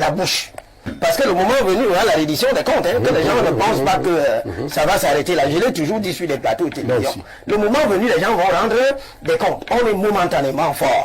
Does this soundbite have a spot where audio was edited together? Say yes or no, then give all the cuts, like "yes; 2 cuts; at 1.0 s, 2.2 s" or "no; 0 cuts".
yes; 1 cut; at 0.9 s